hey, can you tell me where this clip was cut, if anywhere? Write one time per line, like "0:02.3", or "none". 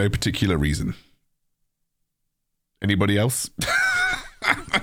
none